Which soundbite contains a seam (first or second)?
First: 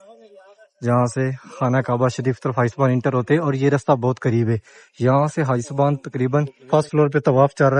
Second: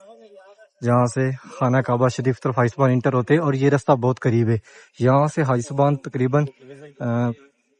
first